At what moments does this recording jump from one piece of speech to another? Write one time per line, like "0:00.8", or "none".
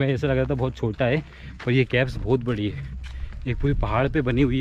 none